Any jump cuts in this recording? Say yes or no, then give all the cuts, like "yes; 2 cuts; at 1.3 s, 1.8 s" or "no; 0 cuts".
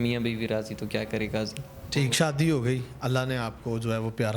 no; 0 cuts